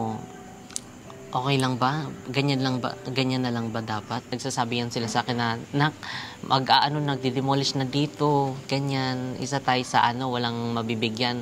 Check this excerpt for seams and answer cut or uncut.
cut